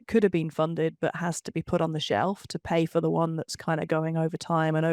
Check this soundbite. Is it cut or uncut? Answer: uncut